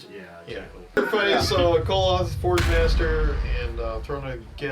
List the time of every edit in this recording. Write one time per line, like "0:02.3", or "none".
0:01.0